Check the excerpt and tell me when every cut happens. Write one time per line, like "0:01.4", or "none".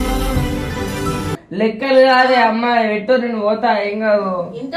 0:01.4